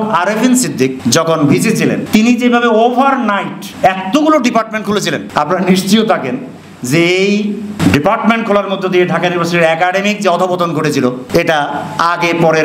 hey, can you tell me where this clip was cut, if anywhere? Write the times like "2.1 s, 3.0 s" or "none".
1.0 s, 2.0 s, 3.6 s, 5.2 s, 7.8 s, 11.2 s